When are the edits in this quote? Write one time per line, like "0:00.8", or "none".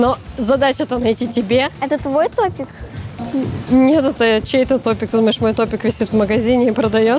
none